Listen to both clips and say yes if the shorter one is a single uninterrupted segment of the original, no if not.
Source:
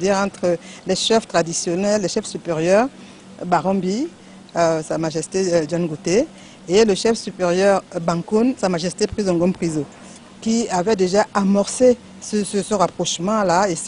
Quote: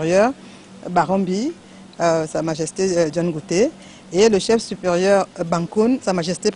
yes